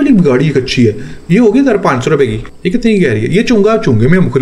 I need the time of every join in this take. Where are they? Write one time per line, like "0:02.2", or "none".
0:02.5